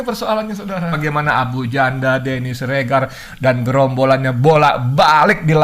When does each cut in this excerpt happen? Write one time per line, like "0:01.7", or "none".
0:01.0